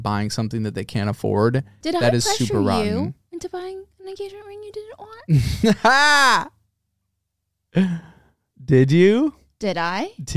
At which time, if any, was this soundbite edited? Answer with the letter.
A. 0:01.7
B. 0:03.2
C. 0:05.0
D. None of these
A